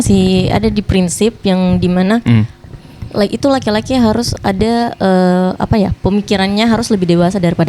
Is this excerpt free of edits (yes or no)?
yes